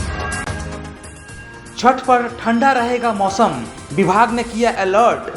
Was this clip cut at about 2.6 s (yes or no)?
no